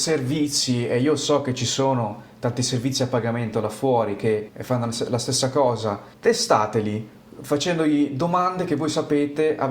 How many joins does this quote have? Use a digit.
2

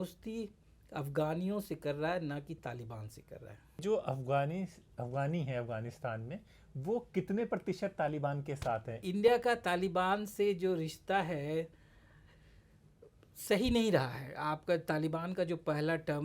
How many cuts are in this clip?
2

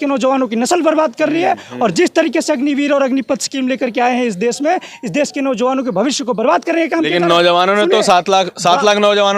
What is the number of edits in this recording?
0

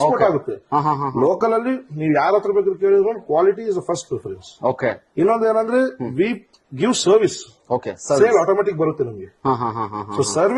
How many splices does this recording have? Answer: 0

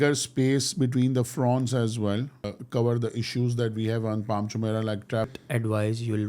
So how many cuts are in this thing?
2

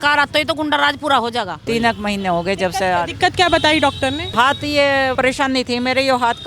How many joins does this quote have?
3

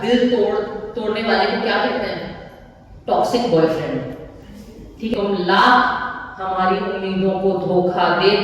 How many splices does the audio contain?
1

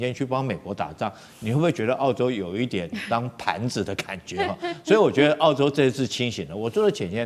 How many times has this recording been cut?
0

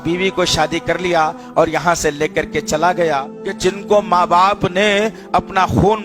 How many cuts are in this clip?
1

